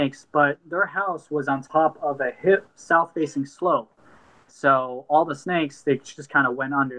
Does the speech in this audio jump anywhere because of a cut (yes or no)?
no